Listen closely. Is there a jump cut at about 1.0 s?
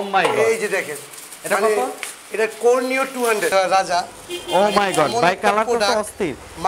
no; 1 cut; at 3.5 s

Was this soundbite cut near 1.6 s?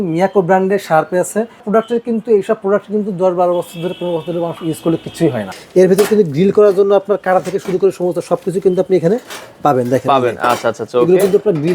yes; 2 cuts; at 1.6 s, 5.5 s

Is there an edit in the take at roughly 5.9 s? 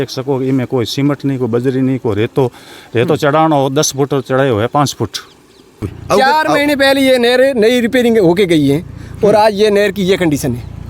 yes; 1 cut; at 5.9 s

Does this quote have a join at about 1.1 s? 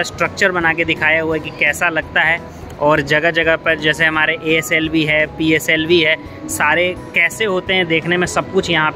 no; 0 cuts

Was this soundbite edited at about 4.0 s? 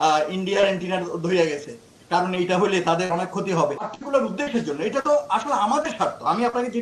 yes; 1 cut; at 4.0 s

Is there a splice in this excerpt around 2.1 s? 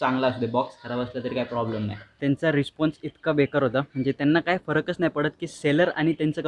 yes; 1 cut; at 2.1 s

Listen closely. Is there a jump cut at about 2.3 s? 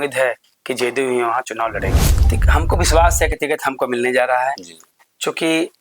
yes; 1 cut; at 2.3 s

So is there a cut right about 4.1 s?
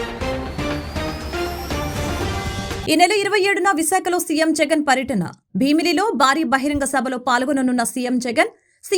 no; 1 cut; at 2.8 s

